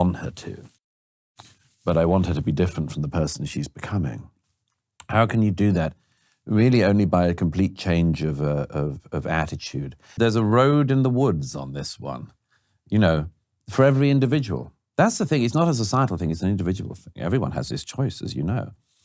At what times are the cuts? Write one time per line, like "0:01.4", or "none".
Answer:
0:10.1